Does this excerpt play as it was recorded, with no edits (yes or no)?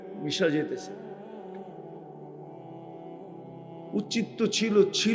no